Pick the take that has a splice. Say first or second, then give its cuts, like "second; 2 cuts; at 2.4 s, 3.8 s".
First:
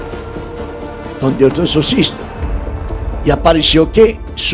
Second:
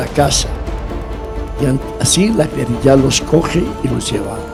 first; 1 cut; at 1.2 s